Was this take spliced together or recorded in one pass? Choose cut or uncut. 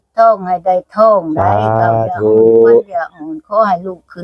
uncut